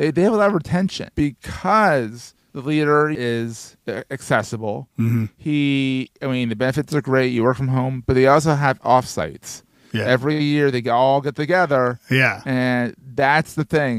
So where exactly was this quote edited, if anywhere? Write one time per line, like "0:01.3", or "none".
0:01.0
0:03.2